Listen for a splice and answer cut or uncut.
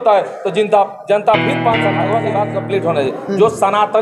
cut